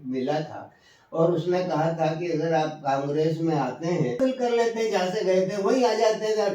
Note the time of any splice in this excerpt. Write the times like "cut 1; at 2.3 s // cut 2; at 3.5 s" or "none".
cut 1; at 4.2 s